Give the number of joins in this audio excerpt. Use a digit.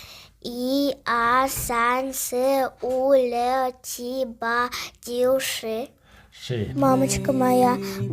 1